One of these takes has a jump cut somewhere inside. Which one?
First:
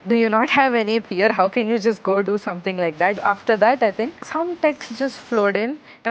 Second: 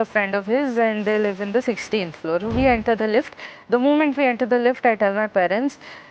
first; 2 cuts; at 3.2 s, 4.2 s

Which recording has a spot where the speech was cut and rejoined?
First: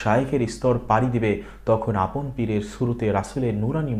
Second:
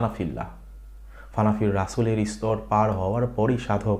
second; 1 cut; at 0.9 s

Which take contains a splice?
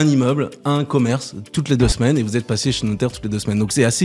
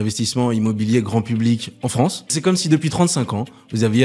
second; 1 cut; at 2.3 s

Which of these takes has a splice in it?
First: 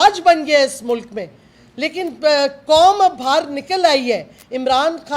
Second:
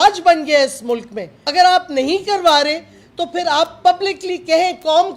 second; 1 cut; at 1.5 s

